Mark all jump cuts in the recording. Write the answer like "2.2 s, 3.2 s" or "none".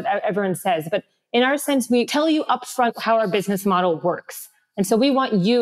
none